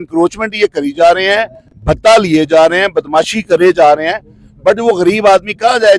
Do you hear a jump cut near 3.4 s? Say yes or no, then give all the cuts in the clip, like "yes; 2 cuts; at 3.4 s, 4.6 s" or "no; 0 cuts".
no; 0 cuts